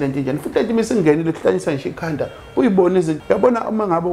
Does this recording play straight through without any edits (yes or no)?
no